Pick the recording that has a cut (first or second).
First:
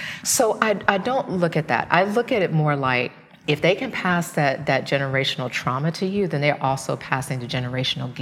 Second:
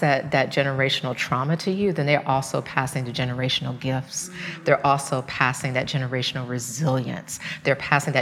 first